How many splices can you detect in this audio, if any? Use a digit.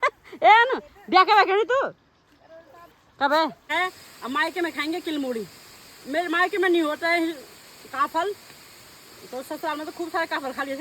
1